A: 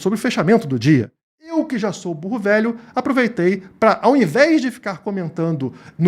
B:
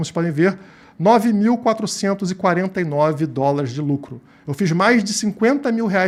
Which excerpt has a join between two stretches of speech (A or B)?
A